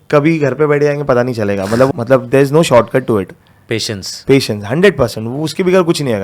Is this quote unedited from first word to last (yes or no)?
no